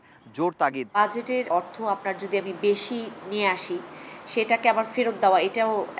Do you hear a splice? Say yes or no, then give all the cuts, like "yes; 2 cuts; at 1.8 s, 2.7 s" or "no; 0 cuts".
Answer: yes; 1 cut; at 1.0 s